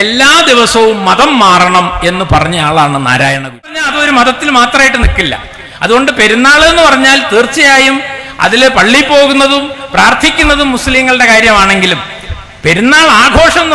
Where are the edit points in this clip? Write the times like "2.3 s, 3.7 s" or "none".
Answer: 3.9 s